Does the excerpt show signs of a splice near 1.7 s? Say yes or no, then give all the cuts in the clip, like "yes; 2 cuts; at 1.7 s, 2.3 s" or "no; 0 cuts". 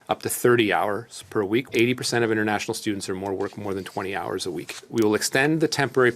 yes; 2 cuts; at 1.7 s, 4.8 s